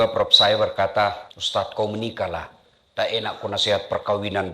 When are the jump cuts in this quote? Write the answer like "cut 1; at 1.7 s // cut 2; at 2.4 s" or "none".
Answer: cut 1; at 1.3 s